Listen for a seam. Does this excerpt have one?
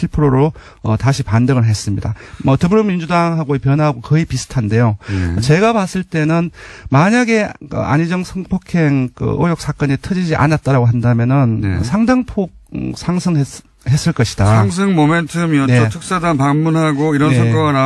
no; 0 cuts

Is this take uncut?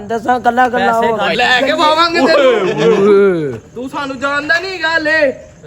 no; 1 cut; at 1.3 s

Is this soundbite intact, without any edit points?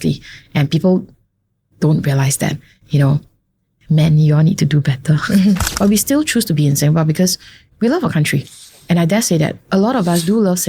no; 1 cut; at 5.7 s

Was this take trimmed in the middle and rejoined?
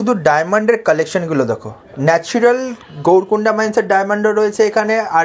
no; 0 cuts

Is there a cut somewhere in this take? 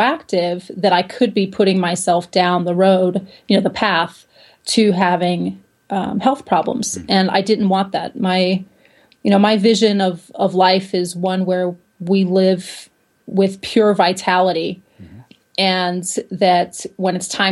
no; 0 cuts

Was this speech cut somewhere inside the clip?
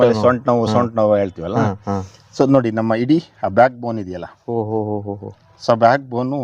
no; 0 cuts

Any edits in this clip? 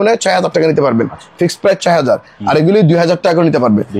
no; 0 cuts

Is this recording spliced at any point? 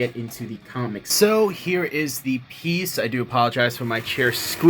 yes; 1 cut; at 1.1 s

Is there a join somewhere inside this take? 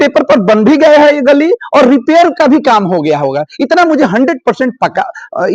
no; 0 cuts

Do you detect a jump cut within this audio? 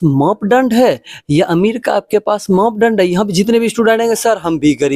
no; 0 cuts

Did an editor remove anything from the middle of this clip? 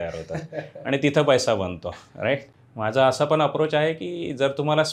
yes; 1 cut; at 2.5 s

